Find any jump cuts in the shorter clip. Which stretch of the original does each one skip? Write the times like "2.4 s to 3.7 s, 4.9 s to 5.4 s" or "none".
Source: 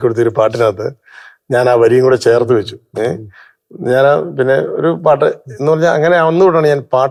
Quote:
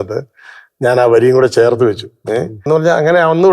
3.2 s to 5.5 s